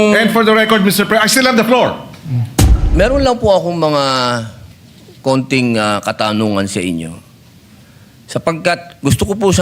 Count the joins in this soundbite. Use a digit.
1